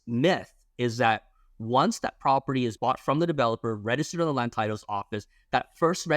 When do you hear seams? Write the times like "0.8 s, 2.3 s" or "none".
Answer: 2.8 s